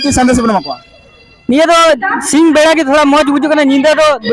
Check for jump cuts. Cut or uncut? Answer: uncut